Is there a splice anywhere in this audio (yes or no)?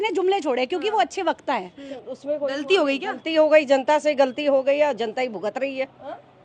yes